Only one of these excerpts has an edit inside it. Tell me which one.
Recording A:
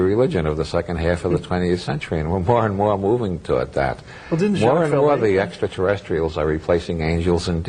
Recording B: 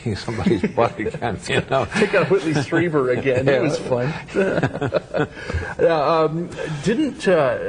A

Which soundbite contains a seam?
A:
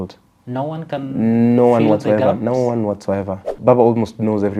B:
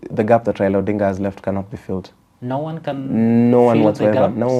A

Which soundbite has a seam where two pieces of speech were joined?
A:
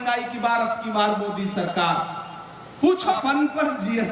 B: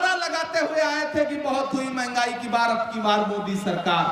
A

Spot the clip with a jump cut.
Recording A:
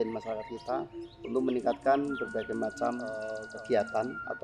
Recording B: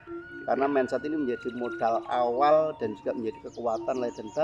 A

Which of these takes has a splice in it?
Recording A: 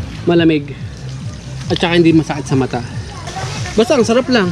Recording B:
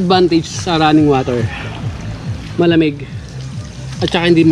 A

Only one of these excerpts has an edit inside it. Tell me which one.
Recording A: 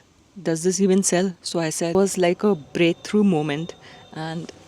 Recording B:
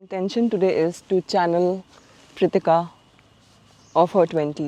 A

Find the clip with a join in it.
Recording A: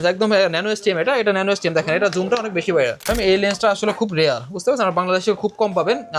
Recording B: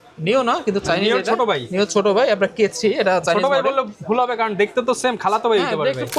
A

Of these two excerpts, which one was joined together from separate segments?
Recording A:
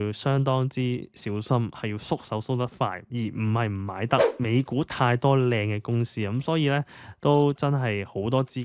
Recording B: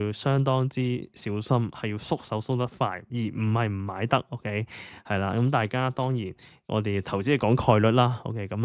A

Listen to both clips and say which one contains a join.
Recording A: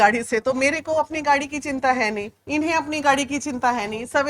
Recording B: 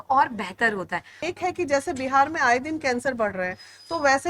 B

